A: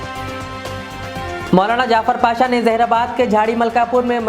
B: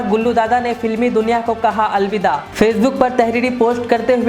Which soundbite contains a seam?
A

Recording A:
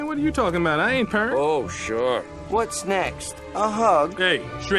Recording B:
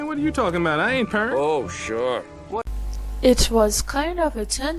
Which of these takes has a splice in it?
A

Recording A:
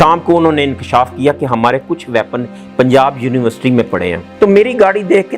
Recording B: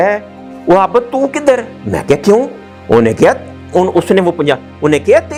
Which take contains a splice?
A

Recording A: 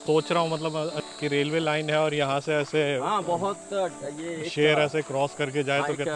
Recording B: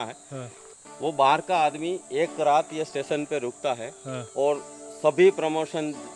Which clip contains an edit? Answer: A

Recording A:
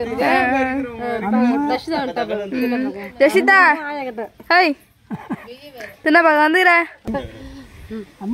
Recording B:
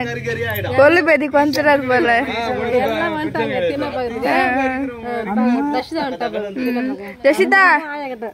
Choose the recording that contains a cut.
A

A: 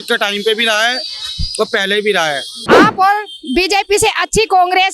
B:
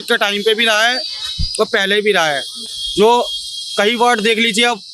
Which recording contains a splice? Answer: A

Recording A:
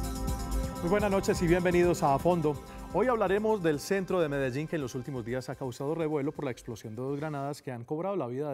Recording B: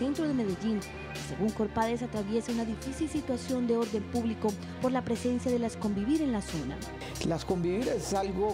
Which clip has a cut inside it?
B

